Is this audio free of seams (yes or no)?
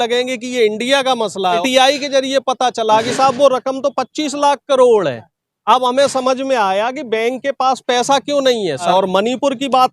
no